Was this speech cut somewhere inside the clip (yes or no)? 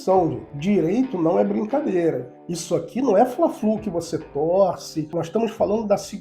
yes